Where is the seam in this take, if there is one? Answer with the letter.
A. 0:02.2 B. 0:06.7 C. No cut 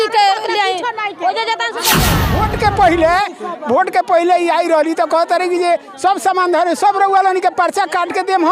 A